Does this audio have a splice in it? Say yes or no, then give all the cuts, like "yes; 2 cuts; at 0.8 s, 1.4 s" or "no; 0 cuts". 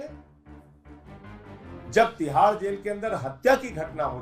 no; 0 cuts